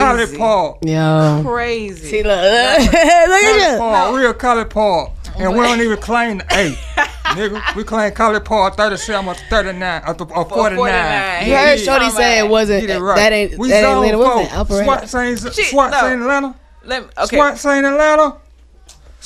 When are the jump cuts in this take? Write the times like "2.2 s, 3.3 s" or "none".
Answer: none